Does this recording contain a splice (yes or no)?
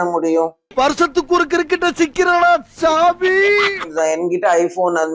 yes